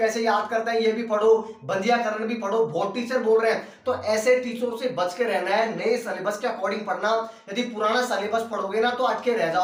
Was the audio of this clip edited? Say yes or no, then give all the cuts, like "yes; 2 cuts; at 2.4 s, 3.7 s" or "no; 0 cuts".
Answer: no; 0 cuts